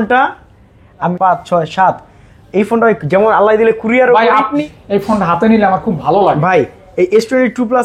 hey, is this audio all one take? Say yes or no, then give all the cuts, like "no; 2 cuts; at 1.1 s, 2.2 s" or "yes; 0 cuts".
no; 2 cuts; at 1.1 s, 4.6 s